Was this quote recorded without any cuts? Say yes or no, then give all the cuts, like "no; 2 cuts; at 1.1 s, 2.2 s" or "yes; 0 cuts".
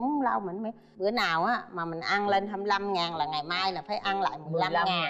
yes; 0 cuts